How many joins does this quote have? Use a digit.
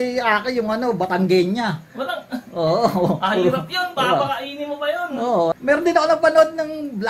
1